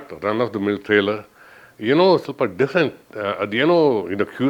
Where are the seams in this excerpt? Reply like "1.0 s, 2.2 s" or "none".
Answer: none